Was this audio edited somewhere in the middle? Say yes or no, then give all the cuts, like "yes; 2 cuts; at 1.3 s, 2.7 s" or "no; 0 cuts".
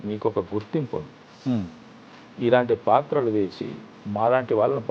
no; 0 cuts